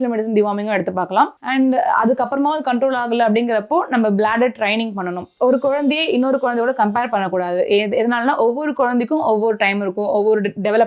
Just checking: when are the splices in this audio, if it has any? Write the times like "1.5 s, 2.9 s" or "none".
5.3 s